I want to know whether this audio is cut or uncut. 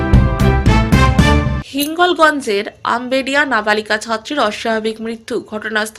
cut